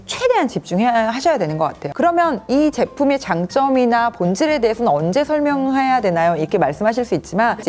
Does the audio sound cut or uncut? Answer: uncut